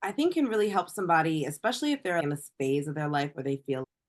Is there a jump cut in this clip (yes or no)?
yes